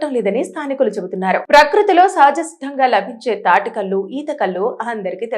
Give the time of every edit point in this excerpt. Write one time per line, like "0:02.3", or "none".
none